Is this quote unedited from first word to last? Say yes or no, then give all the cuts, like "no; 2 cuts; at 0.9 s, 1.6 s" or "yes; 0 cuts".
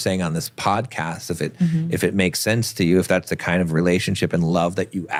yes; 0 cuts